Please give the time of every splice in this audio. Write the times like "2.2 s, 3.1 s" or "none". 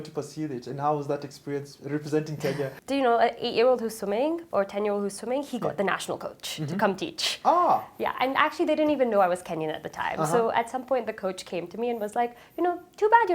2.8 s

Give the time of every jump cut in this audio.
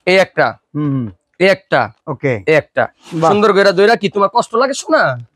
none

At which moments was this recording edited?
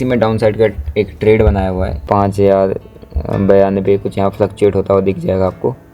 1.9 s

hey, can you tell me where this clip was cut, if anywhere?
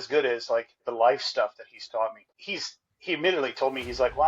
2.3 s

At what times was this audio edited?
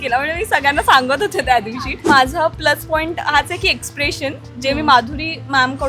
2.0 s

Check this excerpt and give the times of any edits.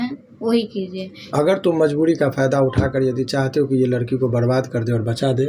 1.1 s

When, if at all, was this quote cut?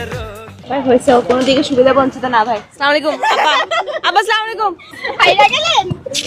5.0 s

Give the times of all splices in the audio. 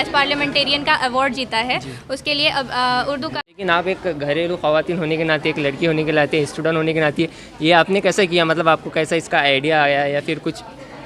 3.5 s

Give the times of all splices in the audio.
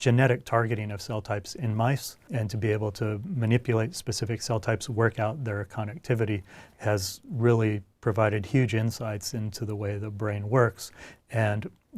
2.2 s

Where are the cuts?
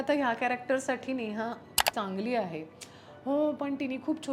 1.7 s

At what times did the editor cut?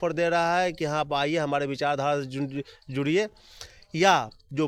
none

